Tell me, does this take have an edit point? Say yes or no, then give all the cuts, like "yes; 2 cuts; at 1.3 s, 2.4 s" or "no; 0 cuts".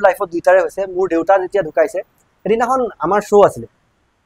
no; 0 cuts